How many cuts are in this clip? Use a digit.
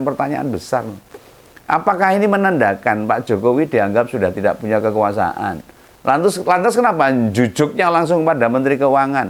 0